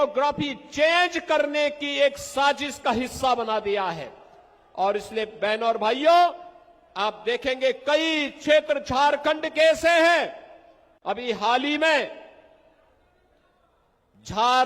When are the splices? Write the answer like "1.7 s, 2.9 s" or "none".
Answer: none